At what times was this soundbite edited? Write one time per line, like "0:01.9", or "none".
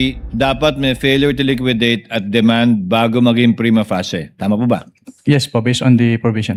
none

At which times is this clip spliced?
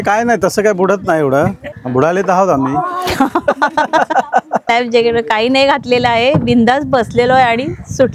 0:01.7
0:04.7

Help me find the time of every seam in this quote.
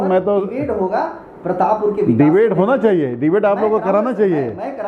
none

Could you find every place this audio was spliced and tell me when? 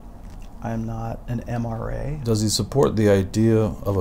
0:02.2

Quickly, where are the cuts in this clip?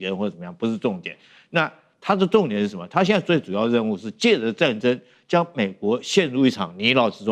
none

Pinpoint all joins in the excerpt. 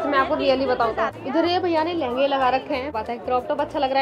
0:01.3
0:02.9

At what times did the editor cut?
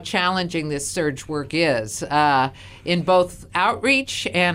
0:03.4

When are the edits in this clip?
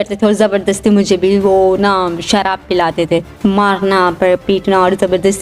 0:03.3

